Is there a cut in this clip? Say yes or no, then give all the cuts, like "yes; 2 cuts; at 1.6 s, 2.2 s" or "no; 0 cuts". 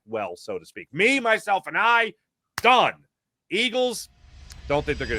no; 0 cuts